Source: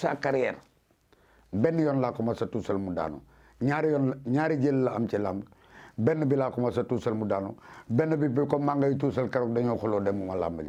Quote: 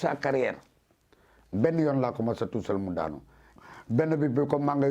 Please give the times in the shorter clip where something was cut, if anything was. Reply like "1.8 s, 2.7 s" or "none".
3.5 s